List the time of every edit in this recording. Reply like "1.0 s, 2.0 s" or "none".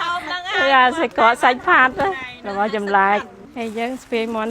3.4 s